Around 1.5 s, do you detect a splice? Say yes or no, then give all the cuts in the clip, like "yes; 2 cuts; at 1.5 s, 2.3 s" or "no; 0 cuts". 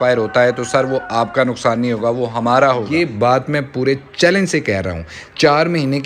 no; 1 cut; at 2.9 s